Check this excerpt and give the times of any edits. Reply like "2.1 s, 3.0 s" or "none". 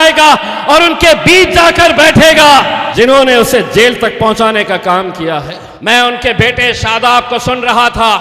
2.8 s, 5.6 s